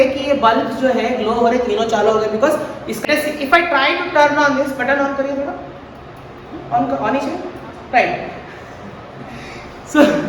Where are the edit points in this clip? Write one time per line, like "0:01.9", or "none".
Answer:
0:02.9